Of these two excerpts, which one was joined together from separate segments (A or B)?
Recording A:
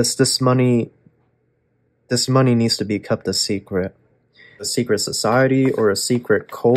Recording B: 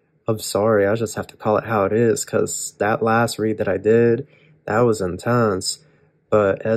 A